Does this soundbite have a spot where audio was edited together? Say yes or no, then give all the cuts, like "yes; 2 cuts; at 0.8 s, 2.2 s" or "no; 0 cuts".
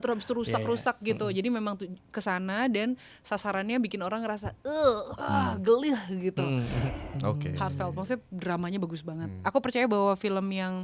yes; 1 cut; at 6.9 s